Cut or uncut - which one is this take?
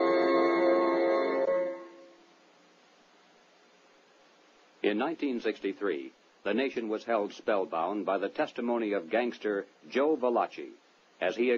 uncut